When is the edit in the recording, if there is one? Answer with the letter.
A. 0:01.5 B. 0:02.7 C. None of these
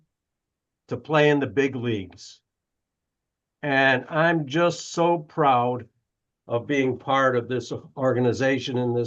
C